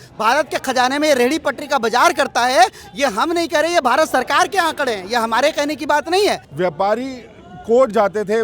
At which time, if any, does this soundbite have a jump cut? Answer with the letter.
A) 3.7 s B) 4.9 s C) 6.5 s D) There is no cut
C